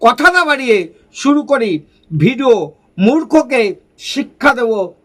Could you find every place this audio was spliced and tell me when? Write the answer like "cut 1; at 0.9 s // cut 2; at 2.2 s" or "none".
none